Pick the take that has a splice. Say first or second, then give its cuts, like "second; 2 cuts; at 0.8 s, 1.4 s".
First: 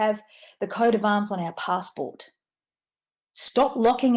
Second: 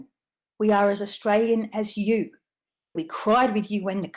second; 1 cut; at 3.0 s